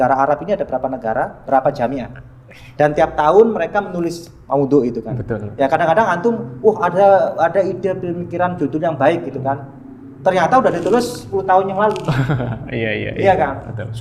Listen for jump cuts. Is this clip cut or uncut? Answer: uncut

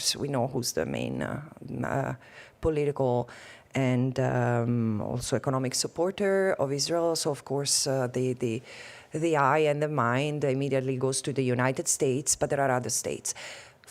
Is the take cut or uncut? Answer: uncut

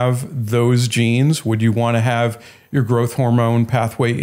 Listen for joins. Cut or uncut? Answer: uncut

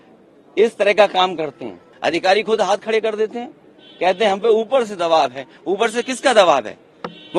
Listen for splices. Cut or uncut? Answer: cut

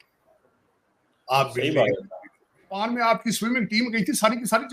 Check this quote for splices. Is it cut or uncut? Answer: cut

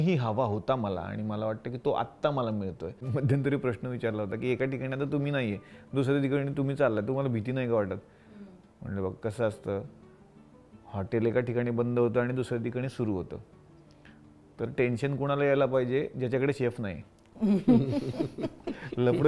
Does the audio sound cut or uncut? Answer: cut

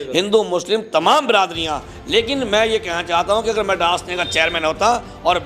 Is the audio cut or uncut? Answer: uncut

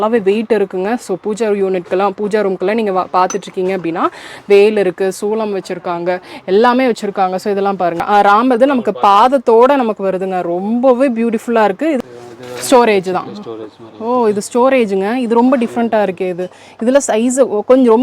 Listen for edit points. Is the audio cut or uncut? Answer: cut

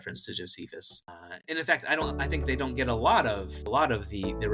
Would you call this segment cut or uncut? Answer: cut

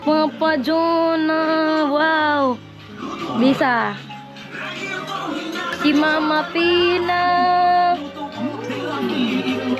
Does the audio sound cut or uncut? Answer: cut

